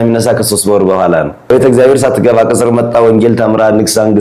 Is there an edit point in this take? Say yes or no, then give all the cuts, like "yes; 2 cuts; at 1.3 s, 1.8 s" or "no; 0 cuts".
yes; 1 cut; at 1.5 s